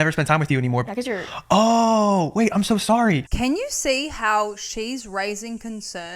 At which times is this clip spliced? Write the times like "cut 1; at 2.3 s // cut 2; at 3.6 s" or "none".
cut 1; at 3.3 s